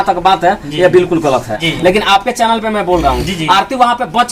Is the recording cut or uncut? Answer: cut